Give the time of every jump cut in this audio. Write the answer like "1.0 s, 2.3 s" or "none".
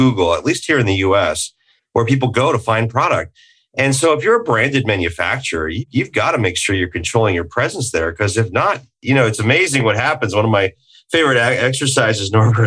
5.8 s